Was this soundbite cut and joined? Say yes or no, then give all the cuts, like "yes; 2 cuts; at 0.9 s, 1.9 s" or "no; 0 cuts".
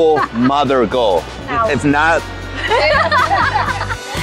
yes; 2 cuts; at 1.4 s, 2.5 s